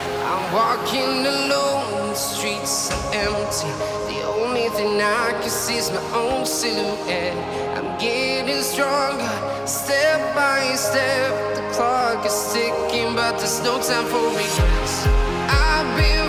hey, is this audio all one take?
yes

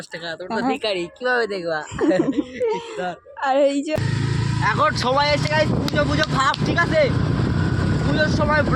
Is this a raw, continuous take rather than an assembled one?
no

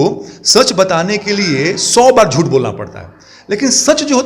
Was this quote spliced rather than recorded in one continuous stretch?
no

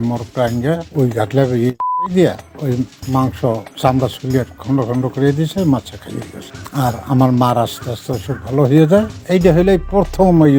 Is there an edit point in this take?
no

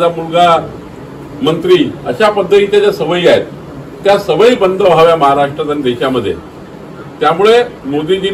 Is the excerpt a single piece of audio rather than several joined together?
yes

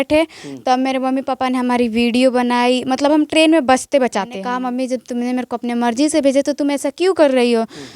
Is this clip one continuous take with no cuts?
no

